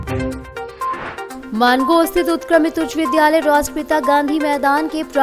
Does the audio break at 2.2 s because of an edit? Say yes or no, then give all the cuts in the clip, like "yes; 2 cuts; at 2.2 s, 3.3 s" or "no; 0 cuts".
no; 1 cut; at 0.9 s